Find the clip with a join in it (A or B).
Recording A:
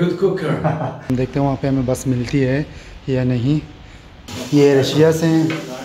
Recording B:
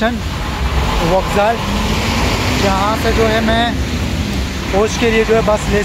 A